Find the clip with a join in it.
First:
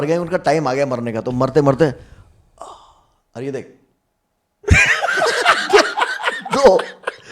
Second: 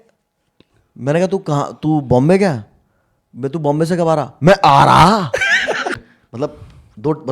second; 1 cut; at 6.0 s

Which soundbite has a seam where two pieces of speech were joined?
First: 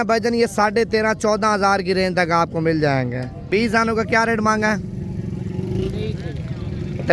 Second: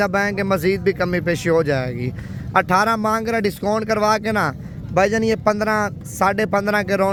first; 1 cut; at 3.4 s

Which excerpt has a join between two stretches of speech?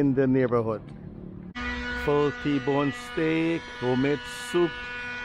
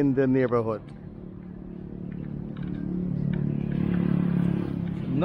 first; 1 cut; at 1.6 s

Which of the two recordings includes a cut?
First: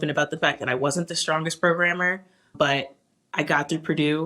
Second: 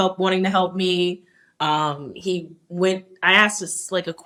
first; 1 cut; at 2.5 s

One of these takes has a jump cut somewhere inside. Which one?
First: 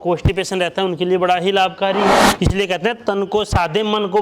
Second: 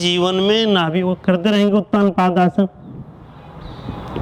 first; 1 cut; at 2.3 s

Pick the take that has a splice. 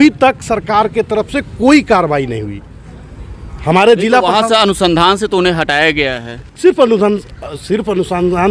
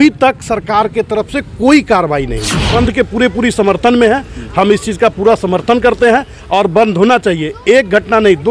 second; 1 cut; at 2.7 s

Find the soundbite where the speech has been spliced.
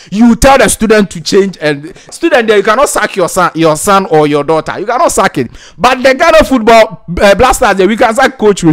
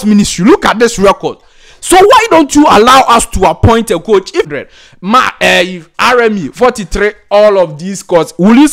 second; 1 cut; at 4.5 s

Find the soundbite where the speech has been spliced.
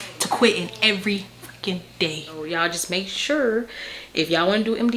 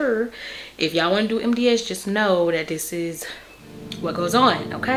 first; 1 cut; at 2.4 s

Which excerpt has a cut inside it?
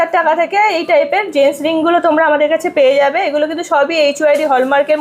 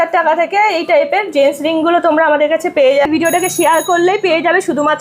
second; 1 cut; at 3.1 s

